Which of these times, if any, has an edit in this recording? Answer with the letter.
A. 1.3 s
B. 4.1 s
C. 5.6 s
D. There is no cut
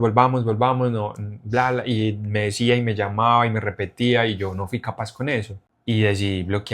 C